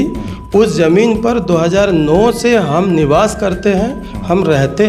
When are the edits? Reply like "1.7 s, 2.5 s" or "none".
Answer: none